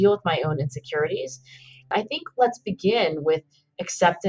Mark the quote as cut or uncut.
cut